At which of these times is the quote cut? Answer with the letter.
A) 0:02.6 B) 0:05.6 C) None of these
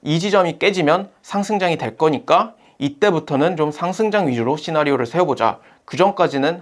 C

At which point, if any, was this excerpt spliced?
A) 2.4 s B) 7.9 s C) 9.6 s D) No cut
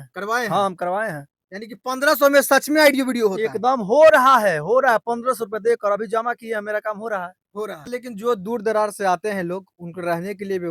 B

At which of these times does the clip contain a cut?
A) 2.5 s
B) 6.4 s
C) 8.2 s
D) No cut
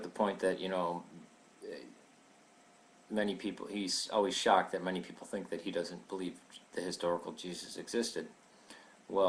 C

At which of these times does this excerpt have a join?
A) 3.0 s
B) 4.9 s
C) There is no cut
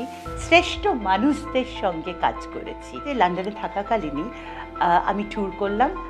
A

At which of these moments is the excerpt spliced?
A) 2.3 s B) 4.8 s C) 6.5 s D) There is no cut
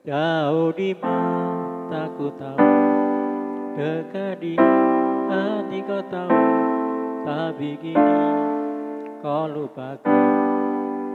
D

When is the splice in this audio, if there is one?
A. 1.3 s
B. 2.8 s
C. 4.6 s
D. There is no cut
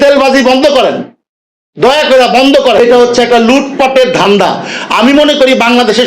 B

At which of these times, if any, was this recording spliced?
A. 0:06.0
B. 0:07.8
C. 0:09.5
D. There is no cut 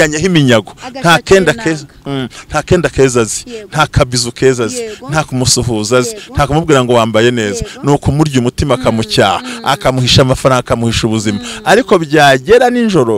D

